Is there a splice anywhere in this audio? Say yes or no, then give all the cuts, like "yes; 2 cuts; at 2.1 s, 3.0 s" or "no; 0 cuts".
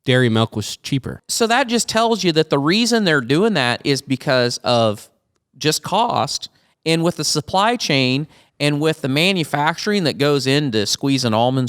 yes; 1 cut; at 1.2 s